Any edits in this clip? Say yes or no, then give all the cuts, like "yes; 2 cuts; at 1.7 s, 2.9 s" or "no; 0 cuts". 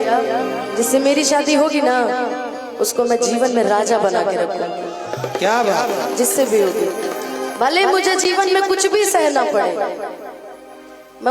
no; 0 cuts